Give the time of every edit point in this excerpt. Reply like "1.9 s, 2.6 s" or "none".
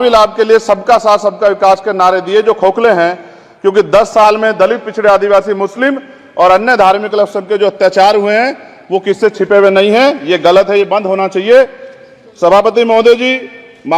none